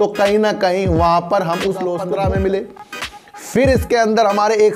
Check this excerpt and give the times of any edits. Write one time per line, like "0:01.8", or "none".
0:02.0